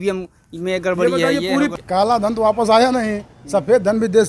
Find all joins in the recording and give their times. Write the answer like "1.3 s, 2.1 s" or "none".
1.7 s